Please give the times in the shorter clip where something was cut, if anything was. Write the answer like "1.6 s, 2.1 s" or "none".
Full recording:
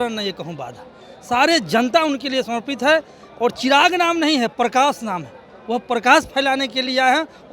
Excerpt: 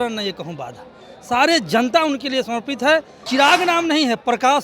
3.3 s